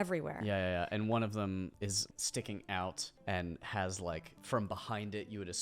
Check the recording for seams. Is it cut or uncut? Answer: cut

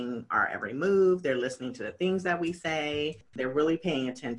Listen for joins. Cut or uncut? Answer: cut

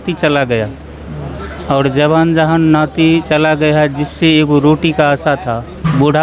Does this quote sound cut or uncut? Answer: uncut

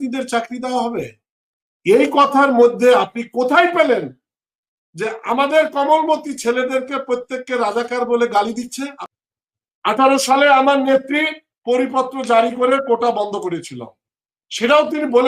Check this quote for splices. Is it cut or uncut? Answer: cut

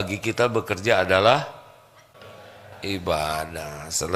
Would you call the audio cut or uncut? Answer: cut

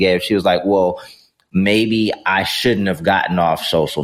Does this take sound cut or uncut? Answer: uncut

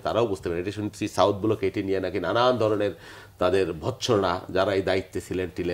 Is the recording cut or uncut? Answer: uncut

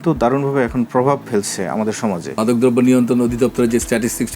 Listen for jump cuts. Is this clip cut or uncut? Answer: cut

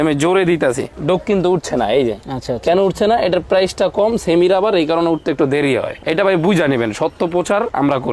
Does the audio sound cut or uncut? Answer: uncut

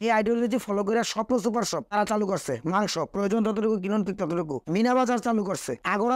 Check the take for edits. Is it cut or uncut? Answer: uncut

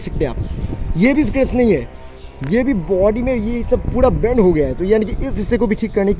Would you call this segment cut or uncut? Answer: uncut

